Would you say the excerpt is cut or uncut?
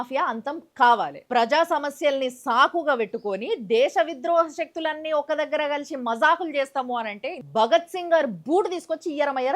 cut